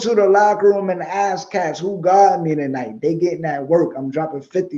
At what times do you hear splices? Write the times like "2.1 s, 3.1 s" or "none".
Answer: none

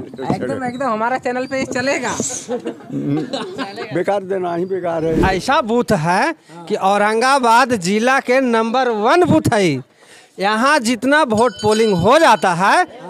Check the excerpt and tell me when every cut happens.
5.2 s

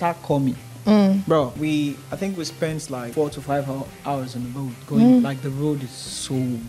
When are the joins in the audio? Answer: 1.5 s, 3.1 s

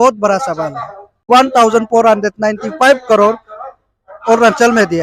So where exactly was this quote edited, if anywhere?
1.1 s

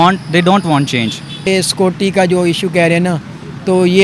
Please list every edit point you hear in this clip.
1.5 s

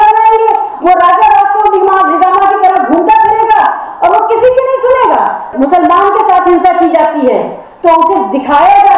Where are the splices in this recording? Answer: 5.5 s

